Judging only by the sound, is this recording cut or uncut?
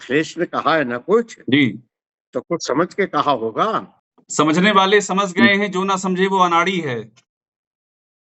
cut